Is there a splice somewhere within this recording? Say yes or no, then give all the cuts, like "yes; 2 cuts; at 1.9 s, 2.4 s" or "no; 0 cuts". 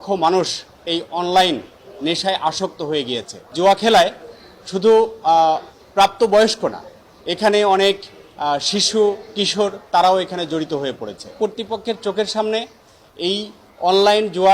yes; 2 cuts; at 3.5 s, 11.3 s